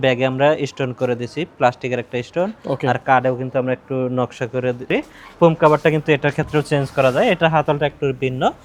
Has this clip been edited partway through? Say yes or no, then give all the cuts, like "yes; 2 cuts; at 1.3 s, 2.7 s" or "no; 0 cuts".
yes; 1 cut; at 4.9 s